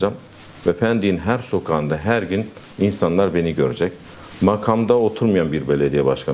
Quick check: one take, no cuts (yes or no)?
yes